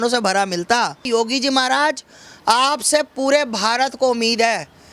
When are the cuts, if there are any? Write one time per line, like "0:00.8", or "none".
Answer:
0:01.1

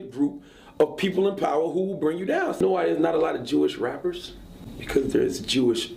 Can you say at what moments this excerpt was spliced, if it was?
0:02.6

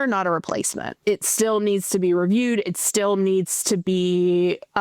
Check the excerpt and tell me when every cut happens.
0:01.0

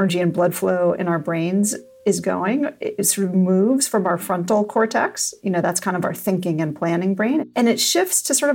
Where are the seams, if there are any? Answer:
0:01.9
0:05.4
0:07.5

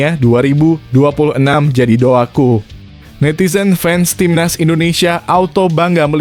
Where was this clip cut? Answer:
none

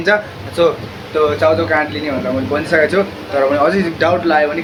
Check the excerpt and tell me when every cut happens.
none

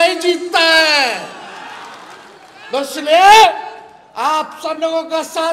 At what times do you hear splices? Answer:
none

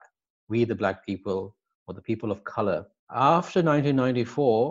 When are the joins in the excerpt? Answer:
0:03.0

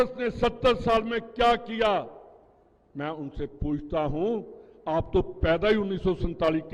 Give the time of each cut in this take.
none

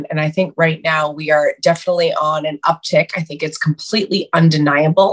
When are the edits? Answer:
none

